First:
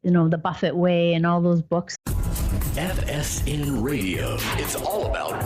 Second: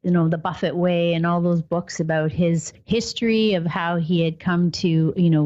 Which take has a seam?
second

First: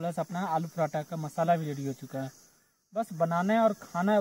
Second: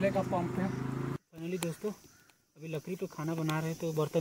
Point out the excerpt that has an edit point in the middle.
second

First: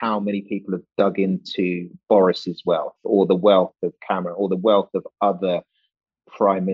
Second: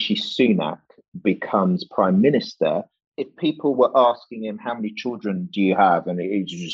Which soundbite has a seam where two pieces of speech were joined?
second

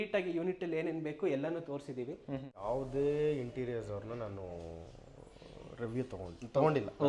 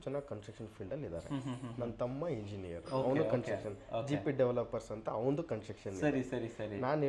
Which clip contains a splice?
first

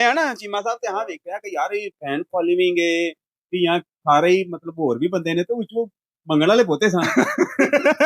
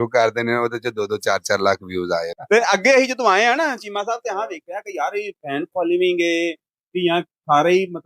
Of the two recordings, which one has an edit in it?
second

